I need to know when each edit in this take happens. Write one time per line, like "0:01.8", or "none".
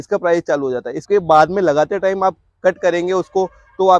0:01.0